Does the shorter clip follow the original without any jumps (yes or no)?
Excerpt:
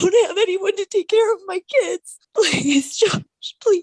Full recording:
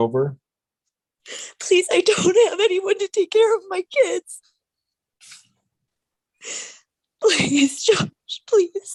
no